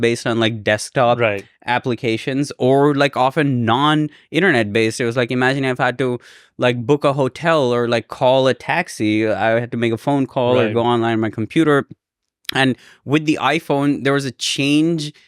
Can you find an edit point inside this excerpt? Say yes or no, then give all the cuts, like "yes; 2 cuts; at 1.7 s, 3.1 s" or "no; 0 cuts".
no; 0 cuts